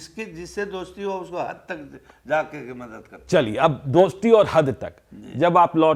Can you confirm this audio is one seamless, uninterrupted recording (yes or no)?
yes